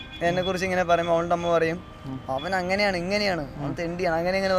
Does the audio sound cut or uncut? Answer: uncut